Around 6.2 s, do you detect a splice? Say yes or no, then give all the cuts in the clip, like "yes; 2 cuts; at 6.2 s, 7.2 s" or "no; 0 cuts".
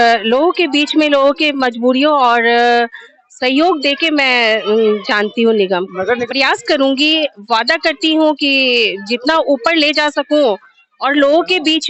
yes; 1 cut; at 6.2 s